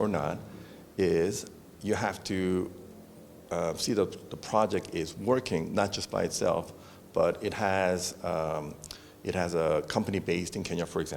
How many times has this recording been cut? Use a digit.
0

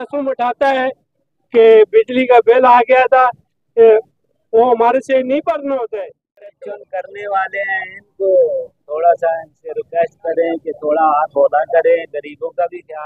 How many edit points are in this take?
1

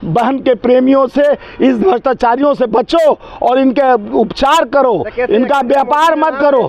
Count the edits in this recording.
0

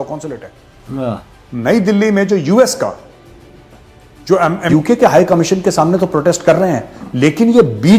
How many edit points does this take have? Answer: 1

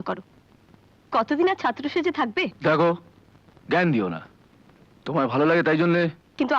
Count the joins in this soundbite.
1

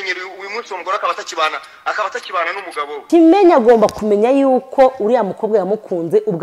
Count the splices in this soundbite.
2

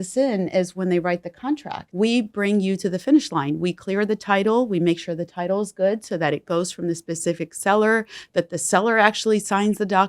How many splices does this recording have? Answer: 1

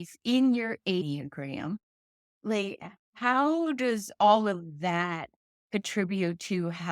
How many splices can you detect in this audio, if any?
1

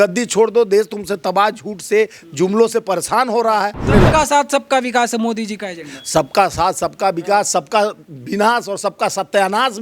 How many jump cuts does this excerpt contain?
1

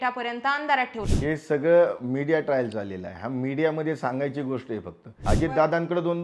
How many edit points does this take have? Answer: 2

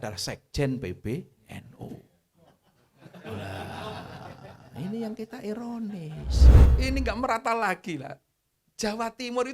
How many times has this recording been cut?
1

